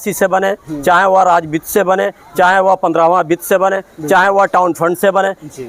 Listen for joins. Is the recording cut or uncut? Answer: uncut